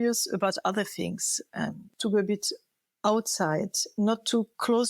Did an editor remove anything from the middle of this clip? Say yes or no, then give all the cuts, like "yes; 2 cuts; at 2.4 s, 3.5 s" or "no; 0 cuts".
yes; 2 cuts; at 1.5 s, 3.9 s